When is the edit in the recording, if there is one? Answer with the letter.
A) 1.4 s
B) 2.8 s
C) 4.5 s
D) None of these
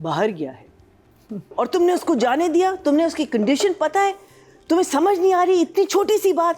A